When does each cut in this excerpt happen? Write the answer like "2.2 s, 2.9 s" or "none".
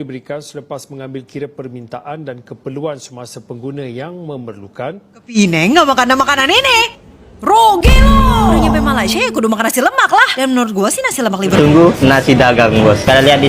5.4 s, 11.5 s